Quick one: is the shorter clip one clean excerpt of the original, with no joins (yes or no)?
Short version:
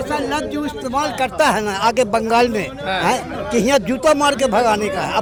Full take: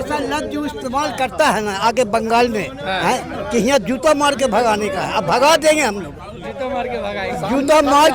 yes